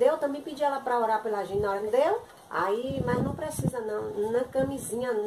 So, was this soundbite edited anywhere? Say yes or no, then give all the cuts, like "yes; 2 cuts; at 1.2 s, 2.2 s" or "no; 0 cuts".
yes; 1 cut; at 1.9 s